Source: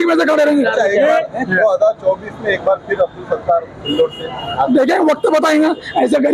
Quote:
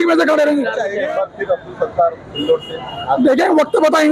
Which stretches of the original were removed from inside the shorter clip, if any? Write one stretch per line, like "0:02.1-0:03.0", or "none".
0:01.0-0:02.5